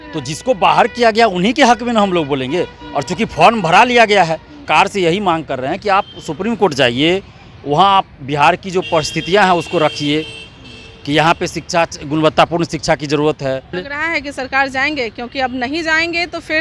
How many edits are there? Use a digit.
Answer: 2